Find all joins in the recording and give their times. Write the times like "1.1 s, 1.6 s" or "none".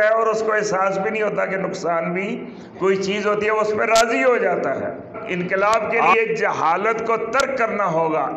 5.2 s